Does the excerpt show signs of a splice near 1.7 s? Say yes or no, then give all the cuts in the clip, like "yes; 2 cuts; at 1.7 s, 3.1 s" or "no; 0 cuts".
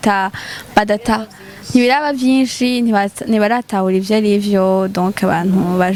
no; 0 cuts